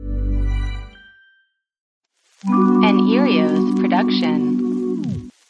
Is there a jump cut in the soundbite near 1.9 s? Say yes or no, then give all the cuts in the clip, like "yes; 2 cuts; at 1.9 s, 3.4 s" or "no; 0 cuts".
yes; 1 cut; at 1.9 s